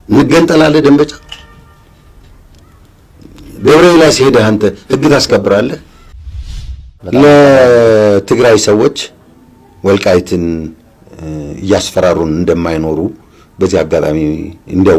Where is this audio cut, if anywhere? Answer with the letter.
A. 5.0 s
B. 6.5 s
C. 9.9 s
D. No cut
B